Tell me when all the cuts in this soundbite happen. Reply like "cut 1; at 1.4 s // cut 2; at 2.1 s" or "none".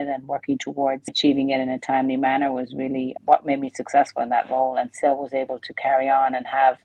cut 1; at 1.1 s